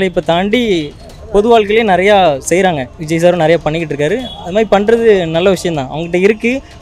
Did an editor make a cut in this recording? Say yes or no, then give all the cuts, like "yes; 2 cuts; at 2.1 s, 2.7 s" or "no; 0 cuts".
yes; 1 cut; at 2.9 s